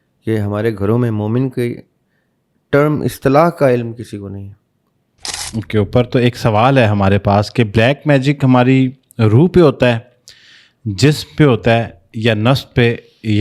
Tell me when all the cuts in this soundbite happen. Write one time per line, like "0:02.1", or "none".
0:05.4